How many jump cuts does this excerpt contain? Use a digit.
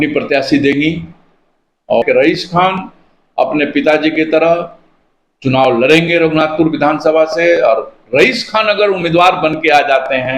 1